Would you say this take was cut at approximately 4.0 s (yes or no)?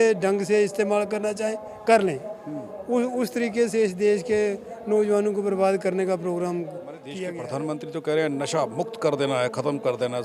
no